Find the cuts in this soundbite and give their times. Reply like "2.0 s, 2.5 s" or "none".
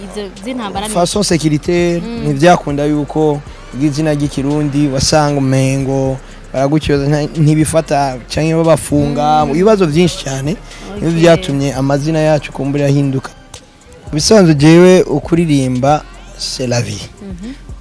13.4 s